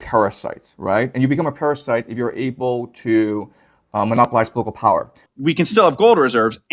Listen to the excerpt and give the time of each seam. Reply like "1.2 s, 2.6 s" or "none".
5.3 s